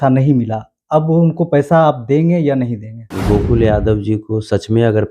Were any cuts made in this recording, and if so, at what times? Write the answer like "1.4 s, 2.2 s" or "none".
3.1 s